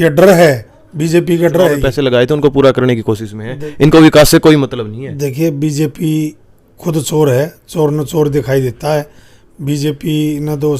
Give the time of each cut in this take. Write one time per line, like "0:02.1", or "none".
0:01.9